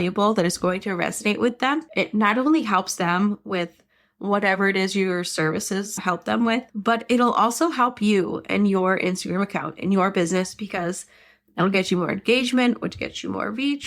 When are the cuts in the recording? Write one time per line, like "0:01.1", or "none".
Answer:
0:01.9